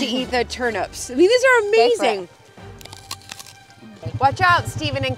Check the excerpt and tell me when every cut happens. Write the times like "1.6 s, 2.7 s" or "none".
4.1 s